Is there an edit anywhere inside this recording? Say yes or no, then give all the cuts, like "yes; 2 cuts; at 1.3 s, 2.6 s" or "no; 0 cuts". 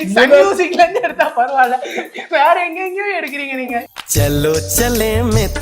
no; 0 cuts